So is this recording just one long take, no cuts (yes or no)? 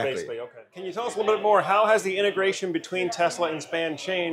no